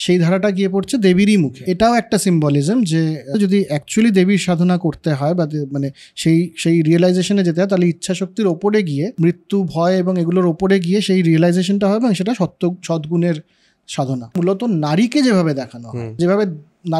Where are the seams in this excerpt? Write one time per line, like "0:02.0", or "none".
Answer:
0:01.5
0:03.3
0:09.1
0:14.4
0:16.2